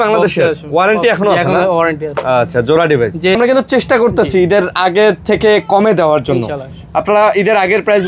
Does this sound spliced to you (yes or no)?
yes